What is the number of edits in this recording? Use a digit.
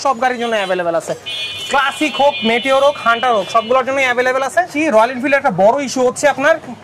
1